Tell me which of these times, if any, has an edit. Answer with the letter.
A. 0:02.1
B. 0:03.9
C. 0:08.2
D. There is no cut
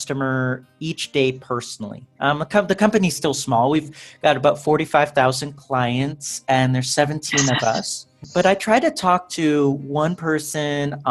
C